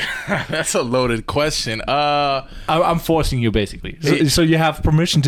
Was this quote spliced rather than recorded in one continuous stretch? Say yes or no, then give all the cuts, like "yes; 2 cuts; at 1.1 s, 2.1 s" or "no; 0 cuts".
no; 0 cuts